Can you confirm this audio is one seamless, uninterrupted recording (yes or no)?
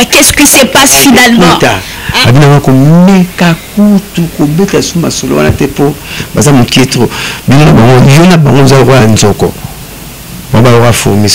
yes